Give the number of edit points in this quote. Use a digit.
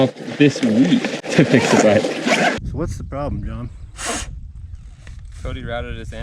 2